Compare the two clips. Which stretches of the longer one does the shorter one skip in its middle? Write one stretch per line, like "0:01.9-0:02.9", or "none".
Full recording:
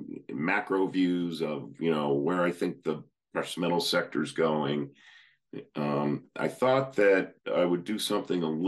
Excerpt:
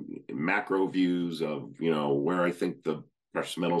none